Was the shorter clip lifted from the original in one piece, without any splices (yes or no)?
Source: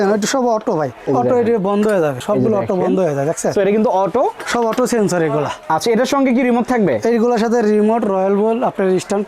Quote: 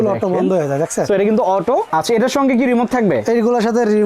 no